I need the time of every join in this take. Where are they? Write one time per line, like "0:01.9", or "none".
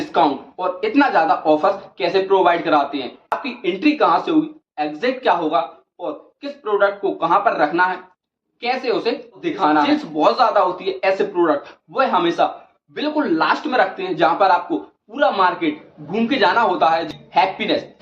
0:03.3
0:09.9
0:14.3
0:17.0